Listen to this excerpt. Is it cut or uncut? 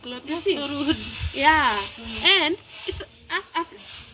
uncut